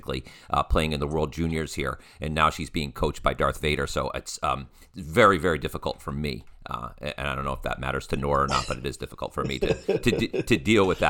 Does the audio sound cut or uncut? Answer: uncut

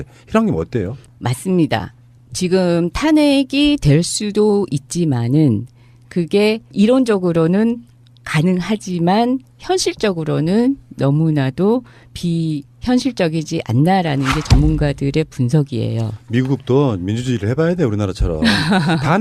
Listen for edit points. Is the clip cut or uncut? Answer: cut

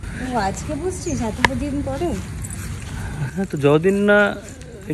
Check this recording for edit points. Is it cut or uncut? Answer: uncut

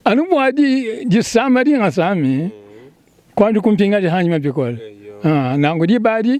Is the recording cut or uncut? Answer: uncut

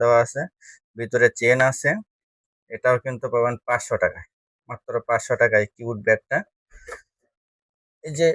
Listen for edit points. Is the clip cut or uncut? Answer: uncut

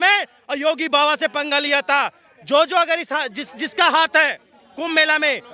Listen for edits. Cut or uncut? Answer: uncut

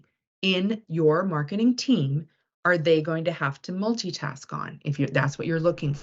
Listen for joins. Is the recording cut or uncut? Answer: uncut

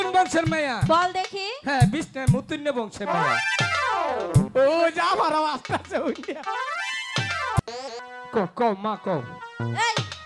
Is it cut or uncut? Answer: cut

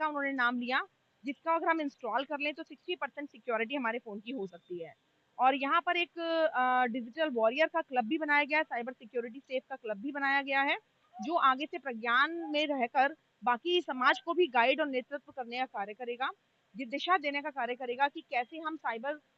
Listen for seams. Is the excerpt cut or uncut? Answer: uncut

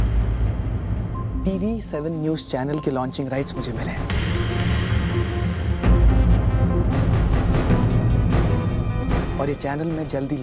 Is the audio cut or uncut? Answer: cut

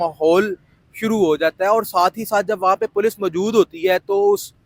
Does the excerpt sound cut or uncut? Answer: uncut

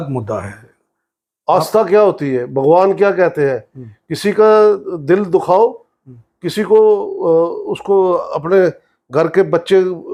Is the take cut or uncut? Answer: uncut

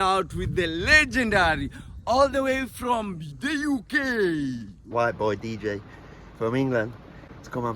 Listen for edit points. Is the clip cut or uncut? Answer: cut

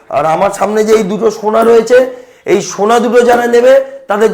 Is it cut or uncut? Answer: uncut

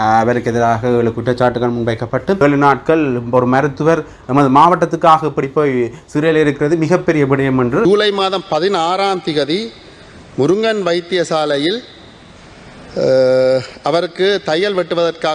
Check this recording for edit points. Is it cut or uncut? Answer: cut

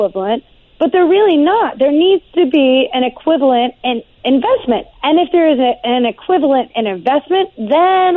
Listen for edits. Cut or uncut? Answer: cut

